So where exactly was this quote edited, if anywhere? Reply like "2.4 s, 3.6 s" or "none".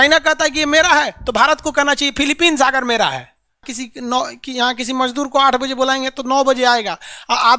3.7 s